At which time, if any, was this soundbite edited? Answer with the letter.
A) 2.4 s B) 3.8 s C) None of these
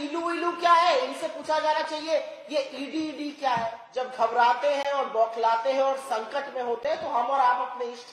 B